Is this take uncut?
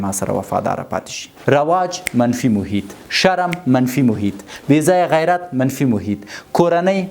no; 1 cut; at 1.3 s

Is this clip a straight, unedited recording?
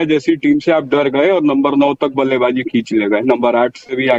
yes; 0 cuts

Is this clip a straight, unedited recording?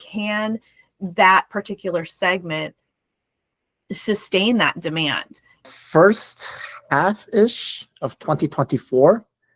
no; 1 cut; at 5.6 s

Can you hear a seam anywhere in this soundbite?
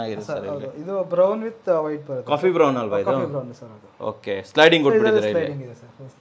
no; 0 cuts

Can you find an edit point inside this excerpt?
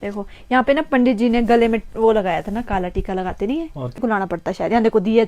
yes; 1 cut; at 4.0 s

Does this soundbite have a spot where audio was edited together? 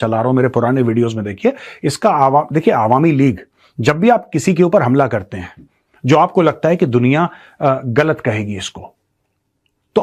no; 0 cuts

